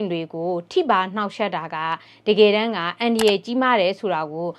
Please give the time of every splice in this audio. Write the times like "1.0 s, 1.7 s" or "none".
none